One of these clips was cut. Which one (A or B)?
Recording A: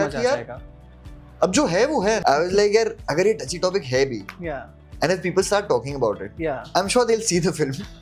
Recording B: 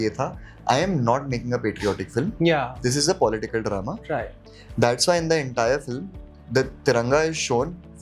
A